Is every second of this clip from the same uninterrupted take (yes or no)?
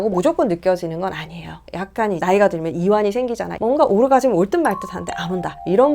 no